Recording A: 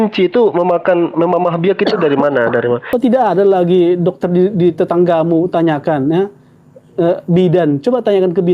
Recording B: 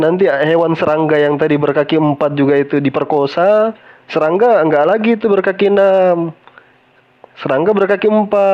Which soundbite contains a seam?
A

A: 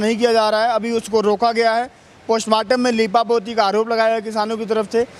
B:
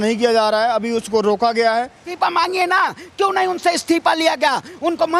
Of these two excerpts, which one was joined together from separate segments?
B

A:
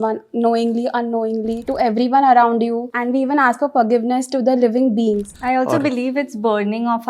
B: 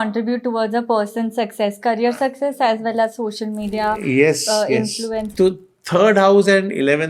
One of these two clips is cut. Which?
A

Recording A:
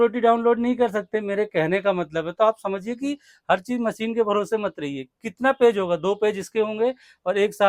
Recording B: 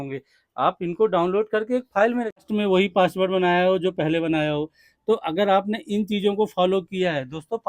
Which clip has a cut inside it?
B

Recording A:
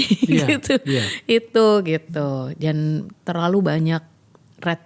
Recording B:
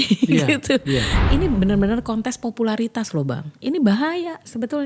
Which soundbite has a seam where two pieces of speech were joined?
B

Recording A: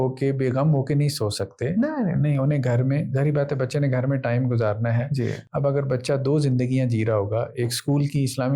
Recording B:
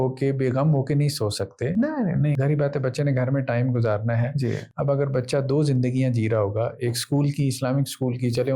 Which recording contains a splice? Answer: B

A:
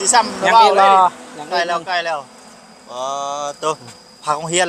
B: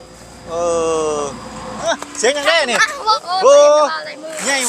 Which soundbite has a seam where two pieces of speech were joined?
B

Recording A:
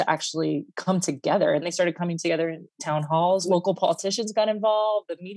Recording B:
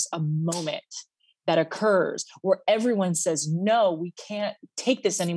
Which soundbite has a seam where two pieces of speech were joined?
A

